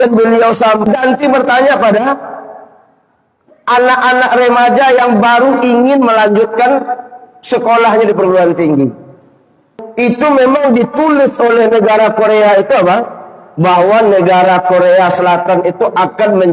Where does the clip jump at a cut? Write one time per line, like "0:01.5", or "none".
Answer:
0:00.8
0:09.8